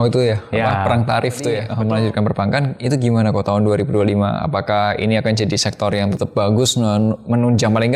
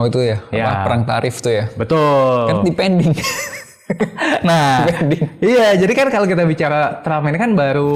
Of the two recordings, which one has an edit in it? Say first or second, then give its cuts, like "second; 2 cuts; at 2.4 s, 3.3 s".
first; 2 cuts; at 1.7 s, 6.2 s